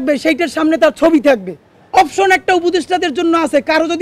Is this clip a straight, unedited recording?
yes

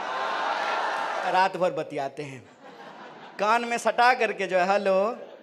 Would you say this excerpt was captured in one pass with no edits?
no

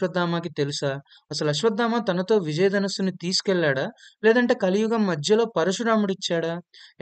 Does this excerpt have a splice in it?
no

